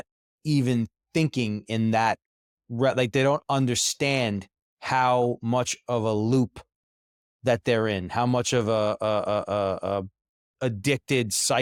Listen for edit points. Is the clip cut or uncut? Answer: uncut